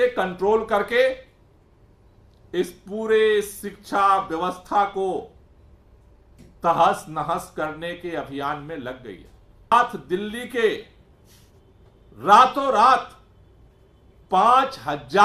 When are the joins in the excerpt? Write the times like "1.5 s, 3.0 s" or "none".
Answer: 9.7 s